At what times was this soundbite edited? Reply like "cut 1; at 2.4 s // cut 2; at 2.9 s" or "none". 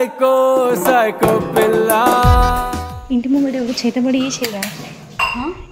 cut 1; at 2.9 s

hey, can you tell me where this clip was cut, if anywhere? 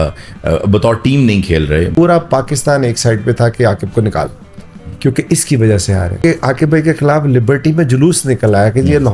cut 1; at 1.9 s // cut 2; at 6.2 s

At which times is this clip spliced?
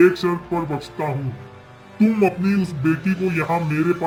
none

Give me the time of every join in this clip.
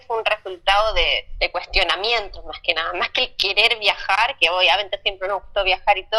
none

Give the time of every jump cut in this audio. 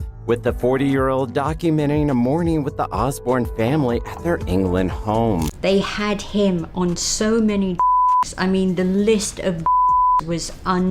cut 1; at 5.5 s

